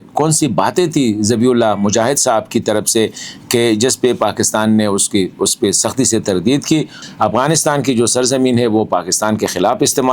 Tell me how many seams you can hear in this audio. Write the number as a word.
one